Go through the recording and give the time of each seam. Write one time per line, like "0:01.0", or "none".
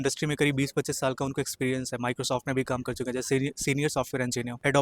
none